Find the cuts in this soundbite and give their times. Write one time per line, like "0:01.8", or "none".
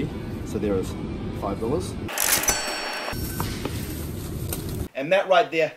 0:04.8